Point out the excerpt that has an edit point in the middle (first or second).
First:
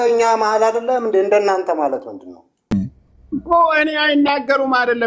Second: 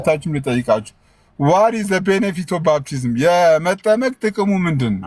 first